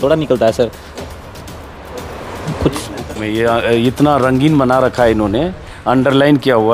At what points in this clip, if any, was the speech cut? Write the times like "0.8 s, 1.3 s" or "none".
3.2 s